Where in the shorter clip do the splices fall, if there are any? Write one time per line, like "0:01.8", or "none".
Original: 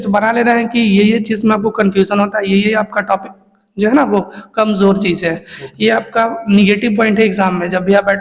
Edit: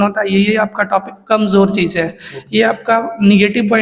0:01.1